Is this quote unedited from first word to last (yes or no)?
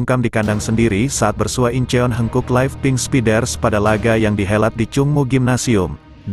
yes